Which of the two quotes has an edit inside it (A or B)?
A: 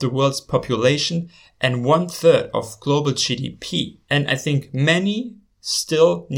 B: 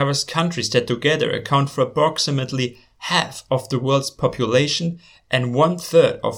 A